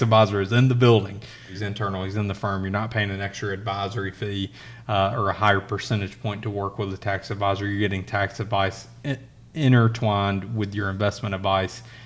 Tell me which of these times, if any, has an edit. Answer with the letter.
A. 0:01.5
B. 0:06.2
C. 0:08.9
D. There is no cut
A